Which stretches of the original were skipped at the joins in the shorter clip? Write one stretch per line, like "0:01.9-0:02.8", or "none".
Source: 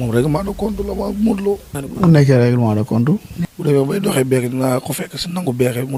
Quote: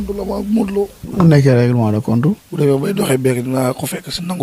0:01.7-0:01.8
0:03.3-0:03.5